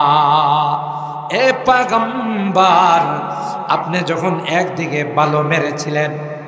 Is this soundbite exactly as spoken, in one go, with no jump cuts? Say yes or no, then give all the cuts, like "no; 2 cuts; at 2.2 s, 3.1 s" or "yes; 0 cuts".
yes; 0 cuts